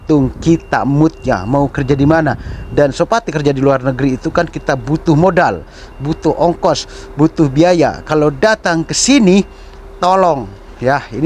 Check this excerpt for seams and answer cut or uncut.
uncut